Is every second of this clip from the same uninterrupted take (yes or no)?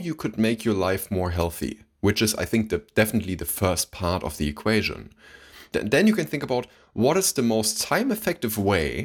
no